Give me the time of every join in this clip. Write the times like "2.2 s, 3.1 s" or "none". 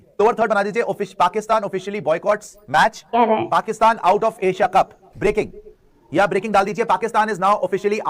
none